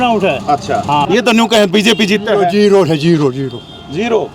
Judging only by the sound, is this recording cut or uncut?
cut